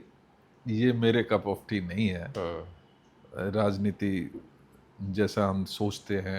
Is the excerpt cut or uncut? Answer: uncut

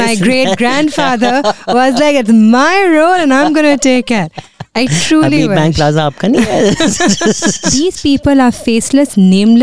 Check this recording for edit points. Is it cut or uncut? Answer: cut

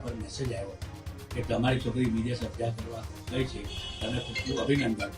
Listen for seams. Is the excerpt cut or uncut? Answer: uncut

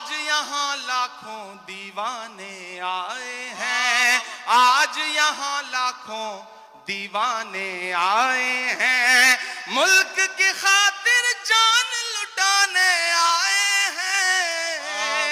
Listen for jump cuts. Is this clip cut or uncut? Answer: uncut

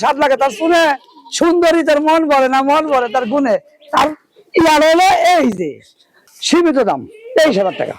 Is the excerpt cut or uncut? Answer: cut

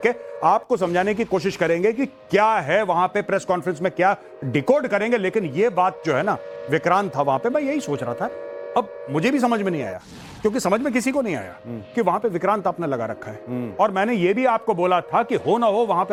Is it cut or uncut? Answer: uncut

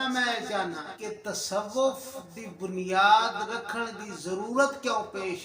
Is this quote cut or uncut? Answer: cut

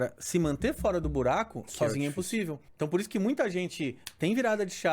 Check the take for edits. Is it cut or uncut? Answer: cut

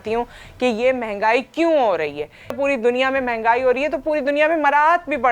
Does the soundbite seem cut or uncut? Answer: cut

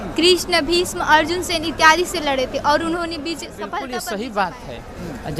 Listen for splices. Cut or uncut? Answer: cut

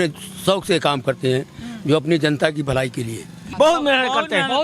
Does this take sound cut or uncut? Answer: cut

